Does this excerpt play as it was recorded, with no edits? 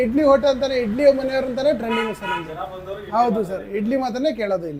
yes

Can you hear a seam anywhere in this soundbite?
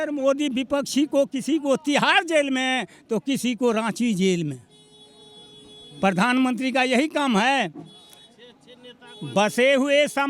no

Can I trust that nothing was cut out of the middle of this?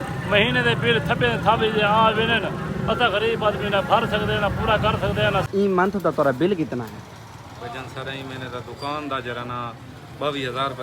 no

